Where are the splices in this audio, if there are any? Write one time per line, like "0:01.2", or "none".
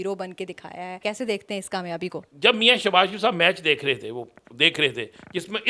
0:01.0
0:02.2